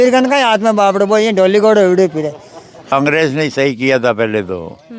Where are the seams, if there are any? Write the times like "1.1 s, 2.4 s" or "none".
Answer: 2.9 s